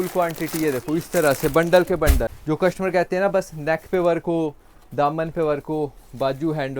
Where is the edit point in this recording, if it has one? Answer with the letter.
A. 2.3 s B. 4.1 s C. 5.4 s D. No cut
A